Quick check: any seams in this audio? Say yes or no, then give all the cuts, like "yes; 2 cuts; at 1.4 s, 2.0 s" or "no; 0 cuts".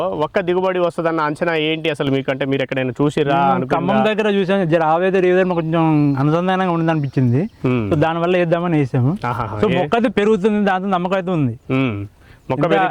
no; 0 cuts